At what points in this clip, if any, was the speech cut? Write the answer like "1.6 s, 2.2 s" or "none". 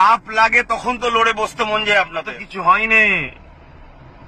2.4 s